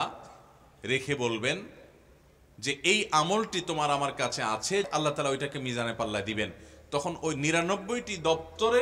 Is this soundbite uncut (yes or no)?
no